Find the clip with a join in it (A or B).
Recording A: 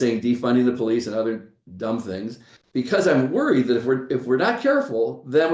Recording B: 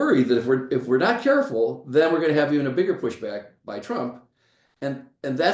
A